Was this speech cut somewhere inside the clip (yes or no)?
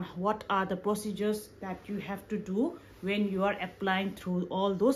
no